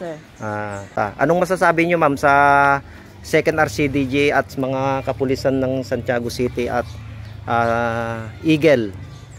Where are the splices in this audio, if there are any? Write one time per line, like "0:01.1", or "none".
0:01.0